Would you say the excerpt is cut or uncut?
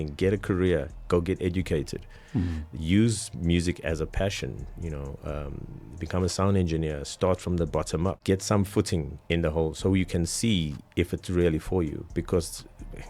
cut